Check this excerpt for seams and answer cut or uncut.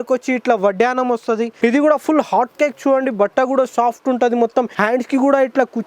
cut